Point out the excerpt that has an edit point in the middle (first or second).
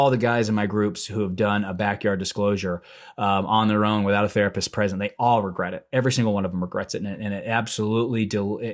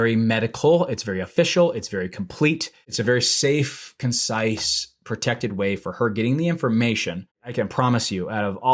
second